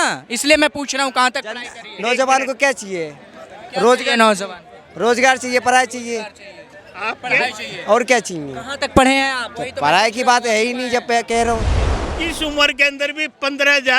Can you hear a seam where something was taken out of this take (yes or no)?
yes